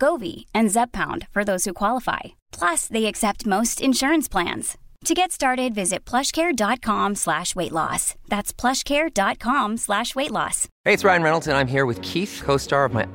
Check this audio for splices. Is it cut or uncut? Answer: cut